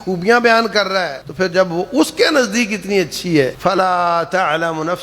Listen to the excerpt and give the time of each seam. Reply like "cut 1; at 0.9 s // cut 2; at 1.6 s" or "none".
cut 1; at 1.2 s // cut 2; at 3.6 s

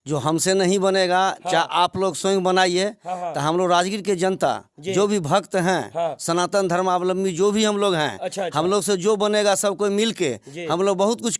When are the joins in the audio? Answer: none

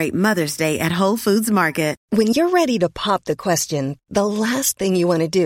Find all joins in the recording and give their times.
cut 1; at 2.0 s

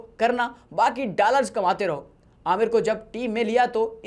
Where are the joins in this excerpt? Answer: none

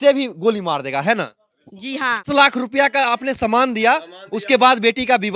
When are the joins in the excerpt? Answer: cut 1; at 2.2 s

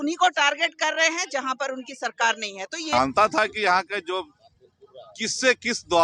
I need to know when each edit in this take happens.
cut 1; at 2.9 s

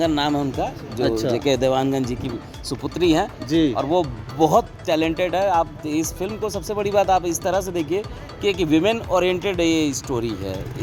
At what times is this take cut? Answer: none

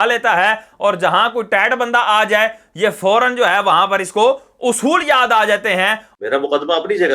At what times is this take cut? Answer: cut 1; at 6.0 s

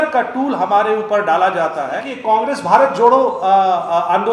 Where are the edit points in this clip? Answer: cut 1; at 2.1 s

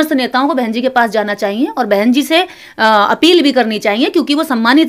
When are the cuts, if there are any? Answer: none

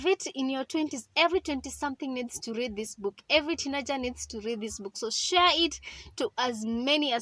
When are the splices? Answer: none

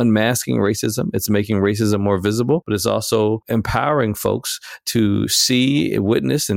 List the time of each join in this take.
cut 1; at 2.6 s // cut 2; at 3.4 s

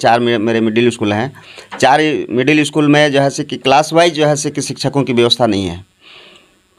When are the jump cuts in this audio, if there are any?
none

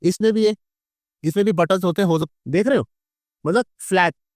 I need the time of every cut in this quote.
cut 1; at 2.3 s

